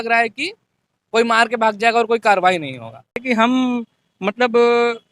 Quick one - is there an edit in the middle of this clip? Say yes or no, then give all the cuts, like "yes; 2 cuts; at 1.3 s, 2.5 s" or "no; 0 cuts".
yes; 1 cut; at 3.2 s